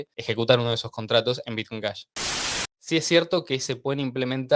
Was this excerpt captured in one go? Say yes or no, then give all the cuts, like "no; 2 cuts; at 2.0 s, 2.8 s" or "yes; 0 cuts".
no; 1 cut; at 2.5 s